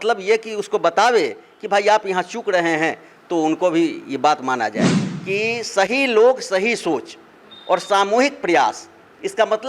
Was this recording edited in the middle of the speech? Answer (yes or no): yes